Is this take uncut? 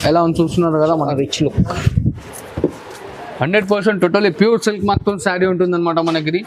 yes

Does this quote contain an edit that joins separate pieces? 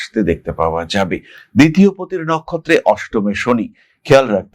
yes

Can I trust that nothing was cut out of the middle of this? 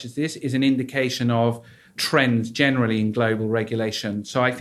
no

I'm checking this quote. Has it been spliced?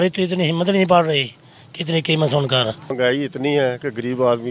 yes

